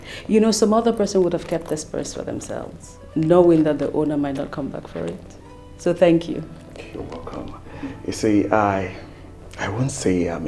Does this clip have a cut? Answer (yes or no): no